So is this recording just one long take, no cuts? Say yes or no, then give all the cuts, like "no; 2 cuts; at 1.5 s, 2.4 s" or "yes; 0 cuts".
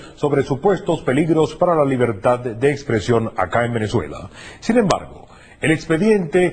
yes; 0 cuts